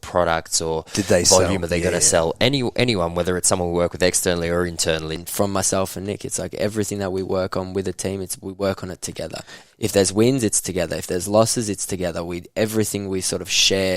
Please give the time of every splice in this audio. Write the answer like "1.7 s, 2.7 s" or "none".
5.1 s